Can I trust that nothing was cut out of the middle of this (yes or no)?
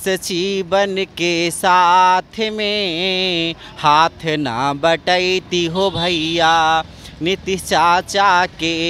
yes